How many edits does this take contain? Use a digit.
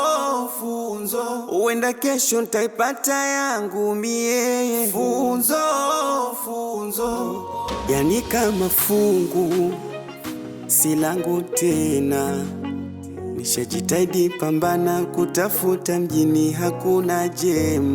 1